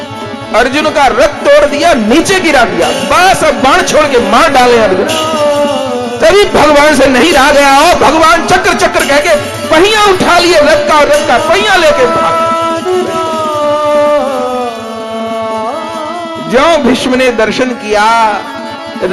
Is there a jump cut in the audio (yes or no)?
no